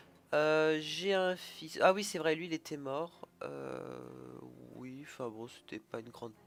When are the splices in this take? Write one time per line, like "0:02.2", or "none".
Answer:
none